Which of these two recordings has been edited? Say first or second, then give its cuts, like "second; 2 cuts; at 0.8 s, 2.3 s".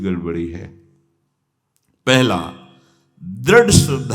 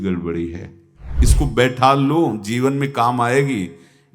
second; 1 cut; at 1.2 s